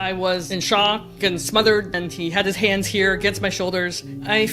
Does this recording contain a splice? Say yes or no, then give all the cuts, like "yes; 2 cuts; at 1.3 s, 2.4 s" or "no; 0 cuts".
no; 0 cuts